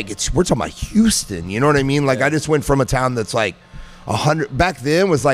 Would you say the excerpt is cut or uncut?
uncut